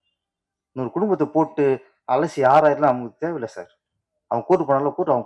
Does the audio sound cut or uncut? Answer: uncut